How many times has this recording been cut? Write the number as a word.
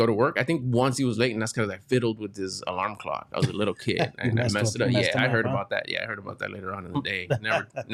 zero